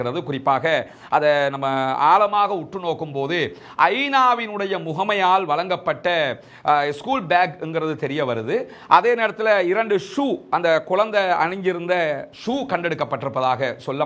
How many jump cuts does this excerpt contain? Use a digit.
0